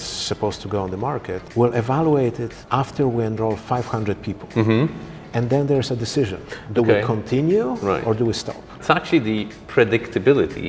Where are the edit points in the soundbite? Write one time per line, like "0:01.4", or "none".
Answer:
0:01.4
0:02.5
0:08.8